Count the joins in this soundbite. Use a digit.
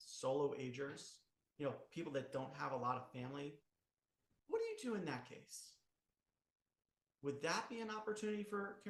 0